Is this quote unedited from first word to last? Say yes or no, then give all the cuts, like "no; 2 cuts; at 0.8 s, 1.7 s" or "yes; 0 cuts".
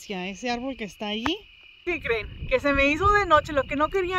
no; 1 cut; at 1.8 s